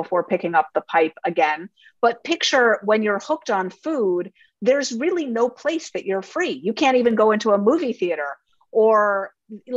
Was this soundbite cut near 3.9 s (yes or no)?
no